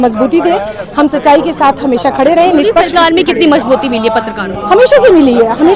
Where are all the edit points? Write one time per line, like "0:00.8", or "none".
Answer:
none